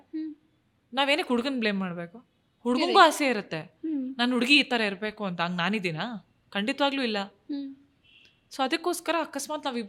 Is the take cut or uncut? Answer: uncut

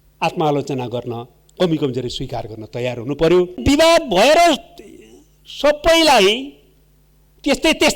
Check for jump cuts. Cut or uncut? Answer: cut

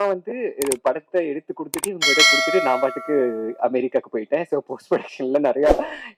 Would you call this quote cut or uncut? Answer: uncut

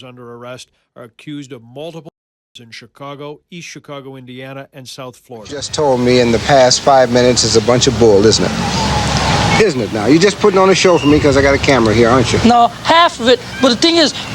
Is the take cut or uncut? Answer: cut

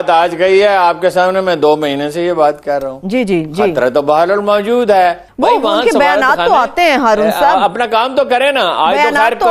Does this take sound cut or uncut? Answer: cut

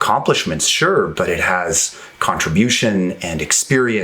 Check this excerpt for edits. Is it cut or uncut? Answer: cut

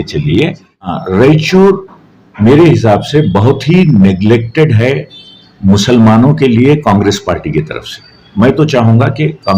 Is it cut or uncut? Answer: cut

